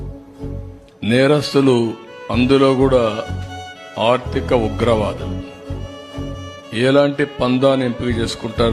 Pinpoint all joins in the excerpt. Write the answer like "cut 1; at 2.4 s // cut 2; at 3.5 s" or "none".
none